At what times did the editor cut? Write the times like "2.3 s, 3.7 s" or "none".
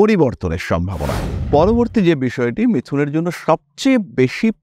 1.3 s